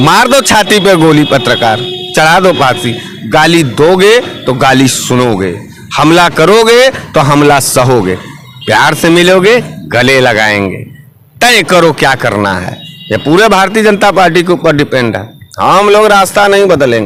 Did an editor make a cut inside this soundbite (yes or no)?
no